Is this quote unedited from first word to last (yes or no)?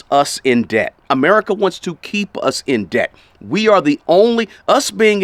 yes